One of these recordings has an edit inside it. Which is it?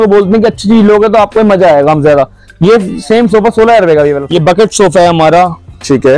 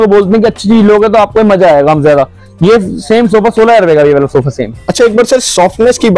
first; 1 cut; at 4.2 s

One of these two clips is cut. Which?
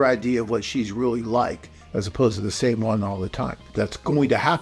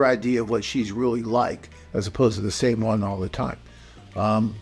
first; 1 cut; at 3.6 s

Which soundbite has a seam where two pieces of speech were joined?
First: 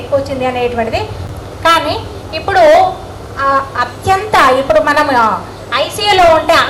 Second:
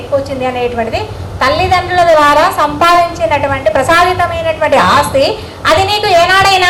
first; 1 cut; at 1.2 s

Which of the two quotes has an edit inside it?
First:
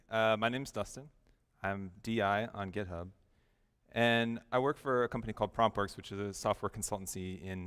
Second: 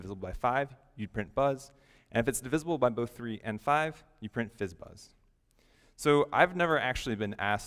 first; 1 cut; at 5.0 s

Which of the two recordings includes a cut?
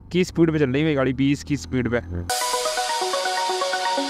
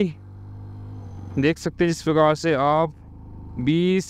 first; 1 cut; at 2.3 s

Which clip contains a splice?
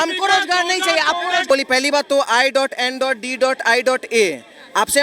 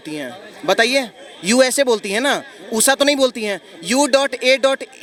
first; 1 cut; at 1.5 s

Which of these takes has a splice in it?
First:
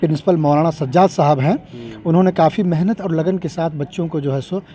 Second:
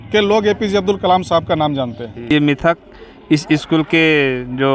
second; 1 cut; at 2.3 s

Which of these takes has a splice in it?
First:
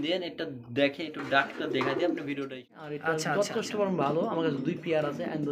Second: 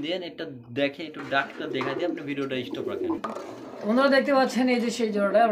first; 1 cut; at 2.7 s

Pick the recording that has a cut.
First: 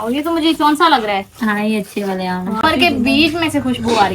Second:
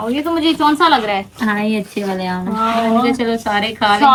first; 1 cut; at 2.6 s

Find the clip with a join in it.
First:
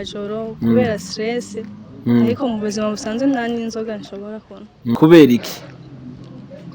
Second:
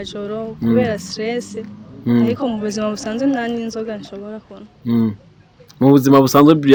first; 1 cut; at 5.0 s

